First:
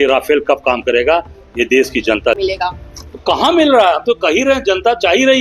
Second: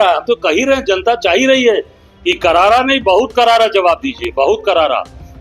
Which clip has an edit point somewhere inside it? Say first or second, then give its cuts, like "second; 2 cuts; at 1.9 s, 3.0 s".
first; 1 cut; at 2.4 s